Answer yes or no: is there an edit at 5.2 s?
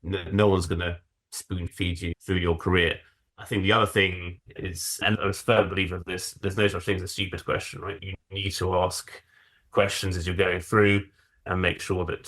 yes